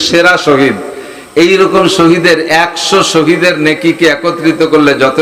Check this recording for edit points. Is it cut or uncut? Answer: uncut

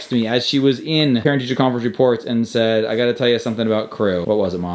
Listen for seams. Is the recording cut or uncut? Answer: cut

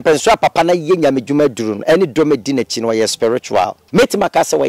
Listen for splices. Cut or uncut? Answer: cut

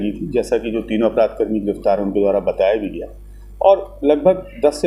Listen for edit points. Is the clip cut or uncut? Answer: uncut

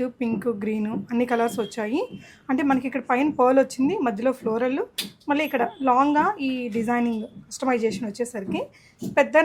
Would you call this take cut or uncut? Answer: uncut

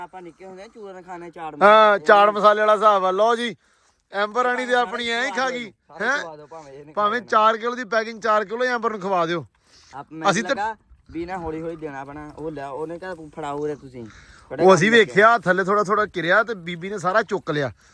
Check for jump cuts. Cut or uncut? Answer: uncut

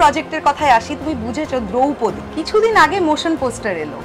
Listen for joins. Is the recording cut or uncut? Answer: uncut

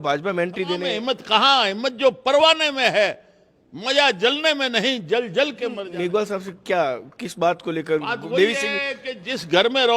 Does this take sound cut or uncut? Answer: cut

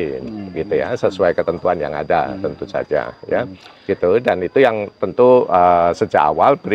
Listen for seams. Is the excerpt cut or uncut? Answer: uncut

